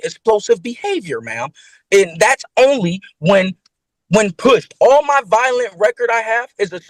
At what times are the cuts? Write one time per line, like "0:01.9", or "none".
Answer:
none